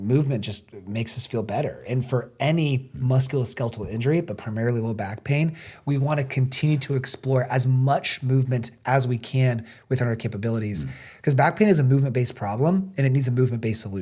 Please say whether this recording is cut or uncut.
uncut